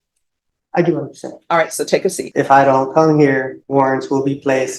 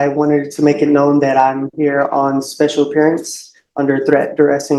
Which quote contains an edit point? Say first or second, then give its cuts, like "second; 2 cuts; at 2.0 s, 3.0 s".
first; 2 cuts; at 2.2 s, 3.6 s